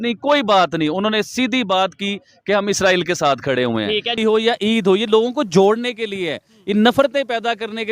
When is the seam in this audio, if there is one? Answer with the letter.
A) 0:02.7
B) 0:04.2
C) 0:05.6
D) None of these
B